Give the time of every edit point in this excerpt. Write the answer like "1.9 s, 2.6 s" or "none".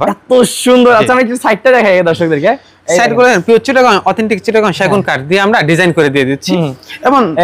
none